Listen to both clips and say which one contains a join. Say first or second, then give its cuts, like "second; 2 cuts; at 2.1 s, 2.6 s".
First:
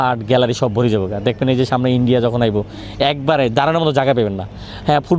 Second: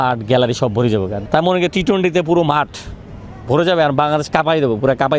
second; 1 cut; at 1.1 s